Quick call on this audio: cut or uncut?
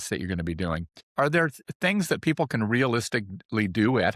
cut